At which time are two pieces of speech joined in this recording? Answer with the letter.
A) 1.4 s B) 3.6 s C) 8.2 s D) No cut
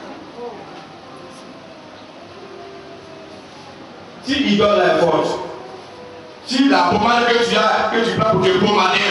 D